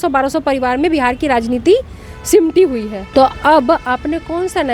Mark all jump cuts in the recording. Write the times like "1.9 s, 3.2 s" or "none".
3.0 s